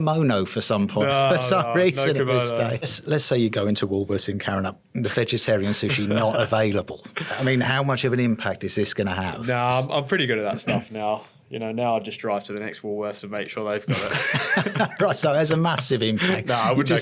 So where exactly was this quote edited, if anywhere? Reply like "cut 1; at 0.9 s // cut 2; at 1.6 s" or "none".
cut 1; at 2.9 s